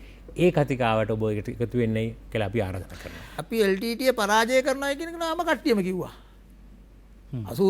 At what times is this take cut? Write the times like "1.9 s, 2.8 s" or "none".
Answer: 3.3 s